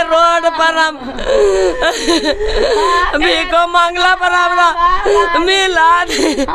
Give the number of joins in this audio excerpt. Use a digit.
0